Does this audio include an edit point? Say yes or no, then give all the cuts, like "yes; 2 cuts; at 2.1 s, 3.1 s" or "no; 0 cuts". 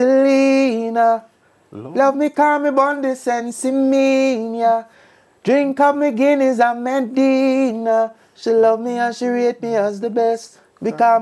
no; 0 cuts